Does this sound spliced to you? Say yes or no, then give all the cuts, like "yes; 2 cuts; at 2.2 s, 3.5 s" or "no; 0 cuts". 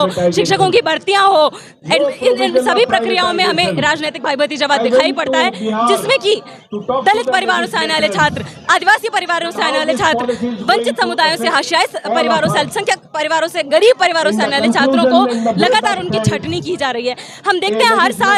no; 0 cuts